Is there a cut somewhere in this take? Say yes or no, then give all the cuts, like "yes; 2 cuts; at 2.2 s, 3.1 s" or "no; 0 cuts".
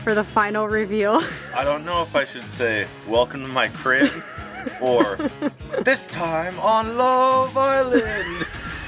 no; 0 cuts